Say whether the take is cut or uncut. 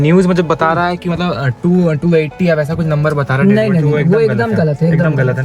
uncut